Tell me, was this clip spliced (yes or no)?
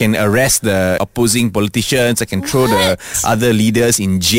yes